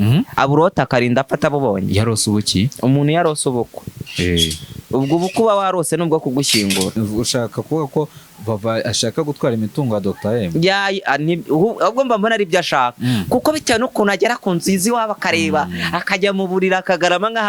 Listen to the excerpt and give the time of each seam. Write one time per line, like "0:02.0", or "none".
0:06.9